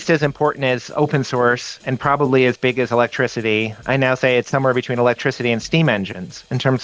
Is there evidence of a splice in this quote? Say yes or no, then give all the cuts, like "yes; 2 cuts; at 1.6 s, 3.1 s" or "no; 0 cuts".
no; 0 cuts